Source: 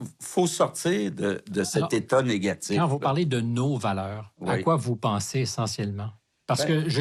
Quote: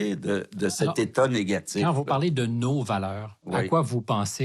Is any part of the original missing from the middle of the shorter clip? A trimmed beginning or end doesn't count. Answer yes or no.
no